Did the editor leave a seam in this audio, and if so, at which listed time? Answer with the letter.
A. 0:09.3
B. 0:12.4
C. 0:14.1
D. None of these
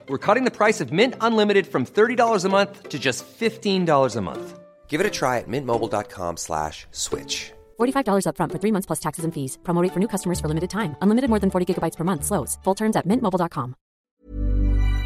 C